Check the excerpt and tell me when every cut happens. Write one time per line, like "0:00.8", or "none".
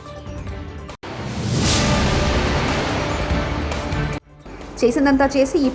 0:00.9
0:04.3